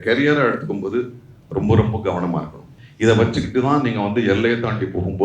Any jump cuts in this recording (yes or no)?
yes